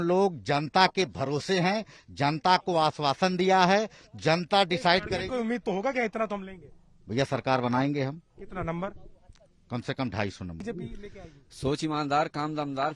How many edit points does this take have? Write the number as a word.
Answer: one